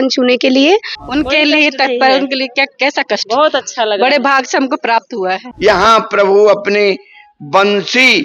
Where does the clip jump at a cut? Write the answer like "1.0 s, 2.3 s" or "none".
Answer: 1.0 s, 5.5 s